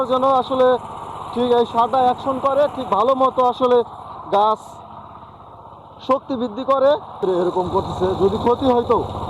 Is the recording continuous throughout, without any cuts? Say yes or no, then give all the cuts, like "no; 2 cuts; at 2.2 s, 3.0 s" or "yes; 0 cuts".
no; 1 cut; at 7.2 s